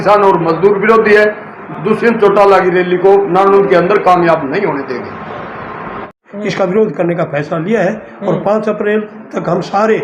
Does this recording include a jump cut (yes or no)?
yes